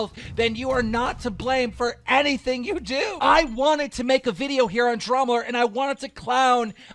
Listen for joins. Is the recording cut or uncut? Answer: cut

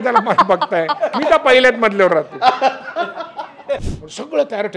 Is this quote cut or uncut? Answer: cut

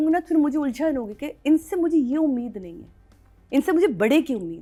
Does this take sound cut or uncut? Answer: uncut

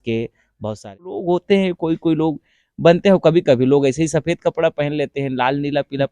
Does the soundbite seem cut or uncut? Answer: cut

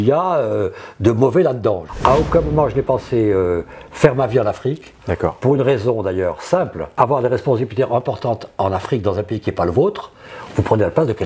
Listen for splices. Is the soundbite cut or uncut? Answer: cut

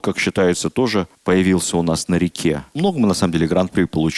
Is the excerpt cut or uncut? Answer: cut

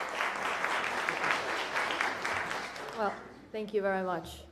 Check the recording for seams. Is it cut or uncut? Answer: uncut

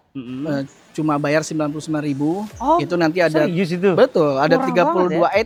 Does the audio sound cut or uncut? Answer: uncut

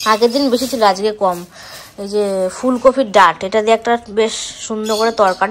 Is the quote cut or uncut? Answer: uncut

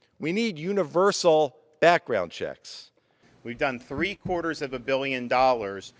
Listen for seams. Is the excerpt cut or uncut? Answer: cut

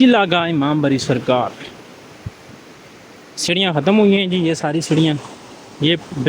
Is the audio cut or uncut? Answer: uncut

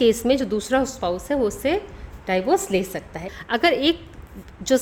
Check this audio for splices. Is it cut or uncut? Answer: cut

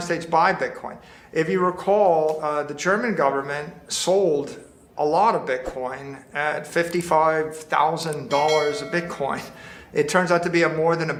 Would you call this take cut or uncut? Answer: uncut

